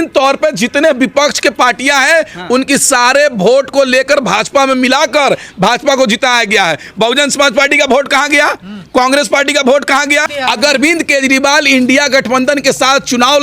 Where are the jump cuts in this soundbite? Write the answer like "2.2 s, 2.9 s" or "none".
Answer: 10.2 s